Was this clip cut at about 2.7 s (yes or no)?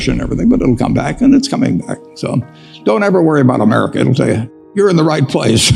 no